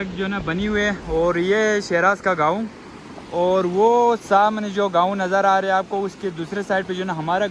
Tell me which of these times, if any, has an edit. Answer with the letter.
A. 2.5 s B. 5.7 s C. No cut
C